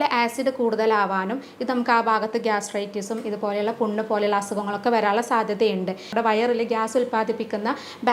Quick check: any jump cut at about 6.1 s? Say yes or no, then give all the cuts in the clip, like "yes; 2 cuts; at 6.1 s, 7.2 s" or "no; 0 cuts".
yes; 1 cut; at 6.1 s